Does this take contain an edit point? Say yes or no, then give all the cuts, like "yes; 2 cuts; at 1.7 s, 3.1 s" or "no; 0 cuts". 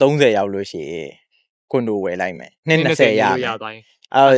yes; 1 cut; at 2.6 s